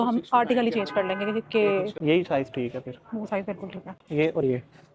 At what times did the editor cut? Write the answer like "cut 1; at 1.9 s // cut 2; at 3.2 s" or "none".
cut 1; at 1.9 s // cut 2; at 3.8 s